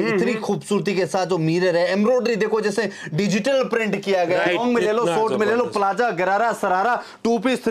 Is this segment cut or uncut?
cut